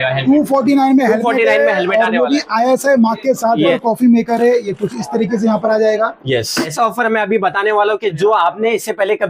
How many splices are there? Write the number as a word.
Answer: two